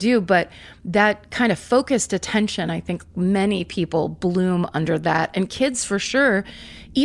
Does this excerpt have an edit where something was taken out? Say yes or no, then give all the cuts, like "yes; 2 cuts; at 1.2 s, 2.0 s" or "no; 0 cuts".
no; 0 cuts